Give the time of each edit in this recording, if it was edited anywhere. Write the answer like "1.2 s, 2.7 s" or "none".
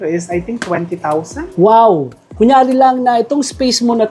2.2 s